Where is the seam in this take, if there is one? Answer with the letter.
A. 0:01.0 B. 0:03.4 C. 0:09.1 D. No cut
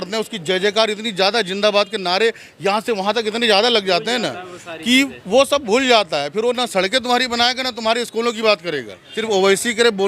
C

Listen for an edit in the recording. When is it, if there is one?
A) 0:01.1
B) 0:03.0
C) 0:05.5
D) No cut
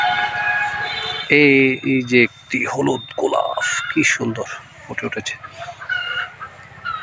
A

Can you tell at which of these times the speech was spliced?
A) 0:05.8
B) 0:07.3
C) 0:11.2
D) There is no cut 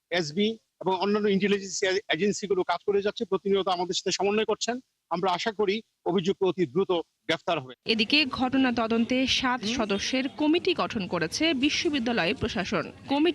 D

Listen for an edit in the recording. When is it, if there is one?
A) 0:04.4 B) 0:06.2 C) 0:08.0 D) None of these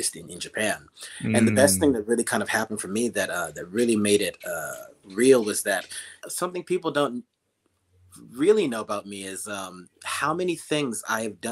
B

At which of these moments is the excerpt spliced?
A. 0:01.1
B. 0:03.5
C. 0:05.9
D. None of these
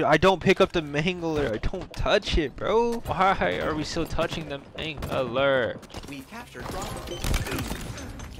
C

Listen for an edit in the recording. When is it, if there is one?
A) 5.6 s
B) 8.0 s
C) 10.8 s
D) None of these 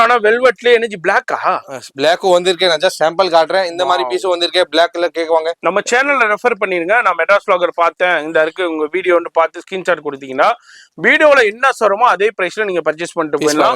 A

